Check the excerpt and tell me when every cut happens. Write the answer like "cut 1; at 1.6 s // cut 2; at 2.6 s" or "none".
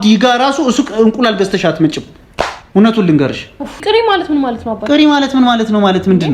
cut 1; at 3.8 s